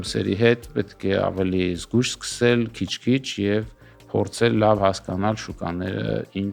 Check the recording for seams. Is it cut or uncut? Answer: uncut